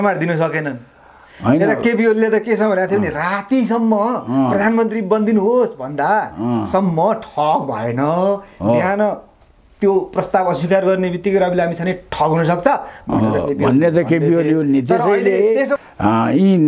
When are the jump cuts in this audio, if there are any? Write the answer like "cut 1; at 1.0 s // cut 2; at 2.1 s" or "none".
cut 1; at 15.8 s